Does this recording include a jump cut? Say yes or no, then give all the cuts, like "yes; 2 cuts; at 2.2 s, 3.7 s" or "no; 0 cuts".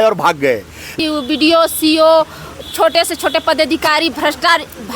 yes; 1 cut; at 1.0 s